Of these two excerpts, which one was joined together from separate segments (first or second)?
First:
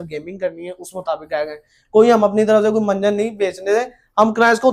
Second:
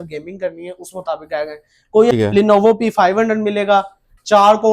second